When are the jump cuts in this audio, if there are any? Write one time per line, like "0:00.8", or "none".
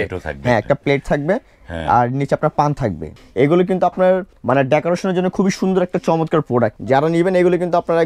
0:03.2
0:04.3
0:06.8